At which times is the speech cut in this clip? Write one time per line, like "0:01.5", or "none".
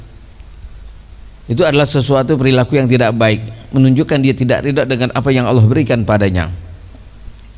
none

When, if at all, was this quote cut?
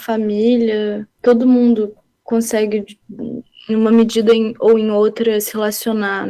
0:01.1

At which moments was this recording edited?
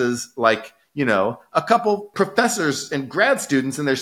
0:02.1

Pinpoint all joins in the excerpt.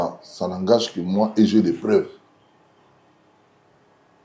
none

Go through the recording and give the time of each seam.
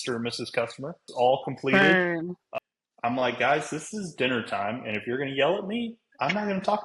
0:01.0
0:02.4

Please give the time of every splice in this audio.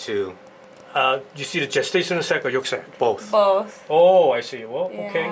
none

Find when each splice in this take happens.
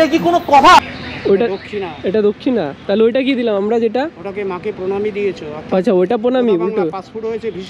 none

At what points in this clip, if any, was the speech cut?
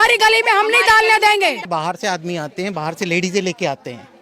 0:01.6

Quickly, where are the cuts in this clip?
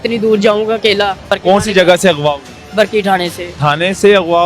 0:01.3
0:03.5

